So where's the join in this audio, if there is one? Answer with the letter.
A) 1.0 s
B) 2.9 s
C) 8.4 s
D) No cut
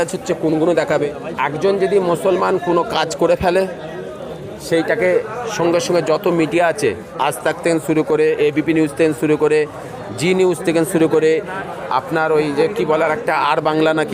A